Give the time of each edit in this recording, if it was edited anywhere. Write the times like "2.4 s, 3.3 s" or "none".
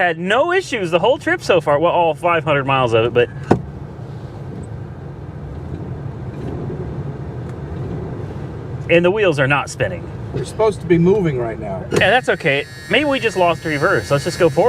none